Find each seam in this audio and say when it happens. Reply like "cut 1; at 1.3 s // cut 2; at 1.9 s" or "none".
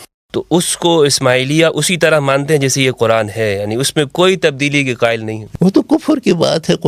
cut 1; at 5.4 s